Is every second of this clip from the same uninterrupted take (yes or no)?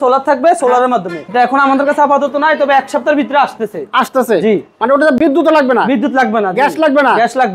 yes